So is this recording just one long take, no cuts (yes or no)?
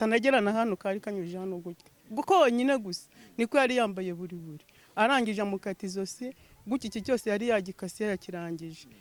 yes